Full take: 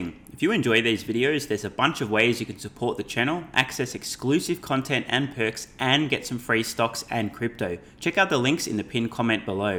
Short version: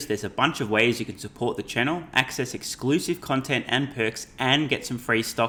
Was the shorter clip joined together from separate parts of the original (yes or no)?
no